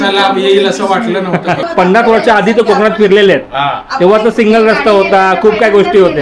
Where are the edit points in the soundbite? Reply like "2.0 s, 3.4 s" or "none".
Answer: 1.6 s